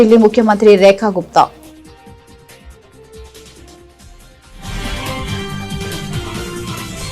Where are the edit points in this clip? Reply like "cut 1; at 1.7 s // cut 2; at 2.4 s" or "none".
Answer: cut 1; at 1.6 s